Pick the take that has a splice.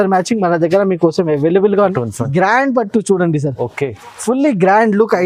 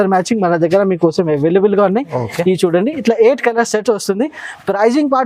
first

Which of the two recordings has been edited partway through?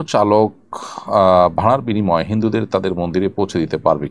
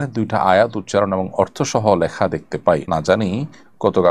second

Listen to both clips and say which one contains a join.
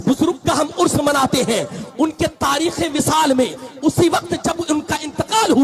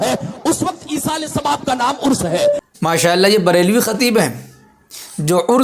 second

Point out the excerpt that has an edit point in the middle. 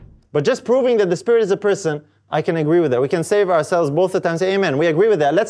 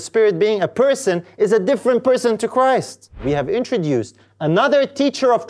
second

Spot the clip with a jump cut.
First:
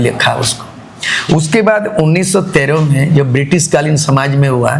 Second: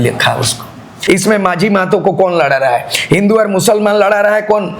second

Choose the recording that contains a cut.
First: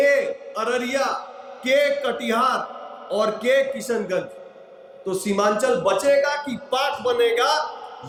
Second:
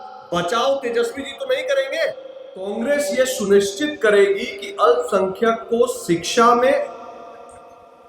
second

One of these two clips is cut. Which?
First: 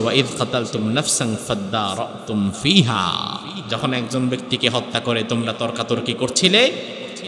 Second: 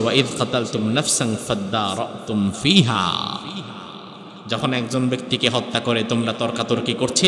first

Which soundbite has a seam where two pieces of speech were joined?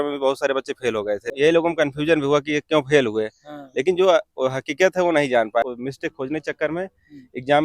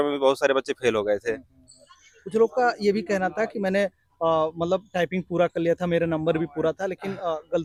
first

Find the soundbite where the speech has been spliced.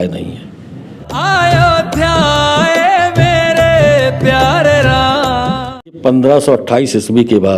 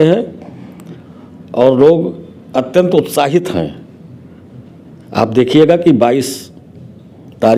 first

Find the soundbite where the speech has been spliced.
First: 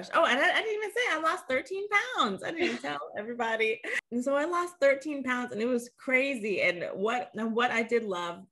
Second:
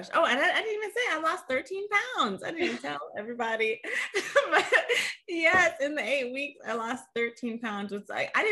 first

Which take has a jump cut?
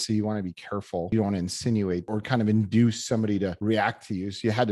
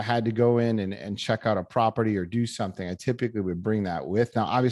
first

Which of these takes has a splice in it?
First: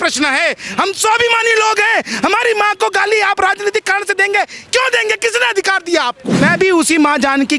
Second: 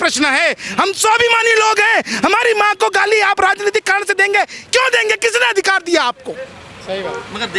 first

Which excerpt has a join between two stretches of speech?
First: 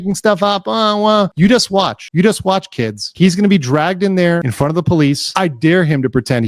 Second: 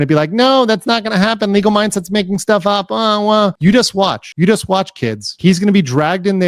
first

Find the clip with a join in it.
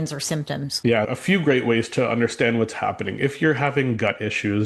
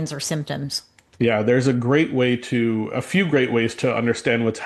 first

